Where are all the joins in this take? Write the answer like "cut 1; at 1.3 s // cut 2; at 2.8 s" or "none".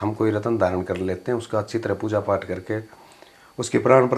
none